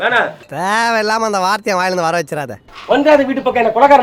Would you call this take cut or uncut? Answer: cut